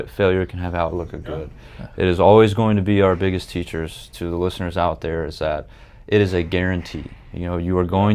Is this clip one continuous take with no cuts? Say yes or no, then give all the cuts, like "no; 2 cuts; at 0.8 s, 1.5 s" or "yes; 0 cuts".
yes; 0 cuts